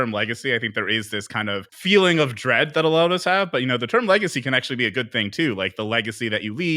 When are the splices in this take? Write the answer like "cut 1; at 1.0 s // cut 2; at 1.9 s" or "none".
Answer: cut 1; at 1.7 s